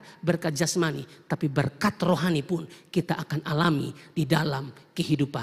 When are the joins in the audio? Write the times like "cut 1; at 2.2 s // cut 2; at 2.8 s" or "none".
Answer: none